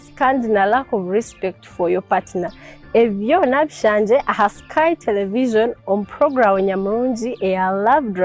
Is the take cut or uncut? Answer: uncut